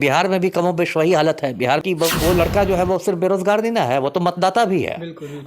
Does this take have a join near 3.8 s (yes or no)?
no